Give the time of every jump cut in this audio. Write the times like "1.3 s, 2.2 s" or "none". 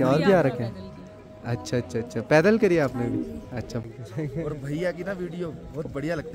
3.8 s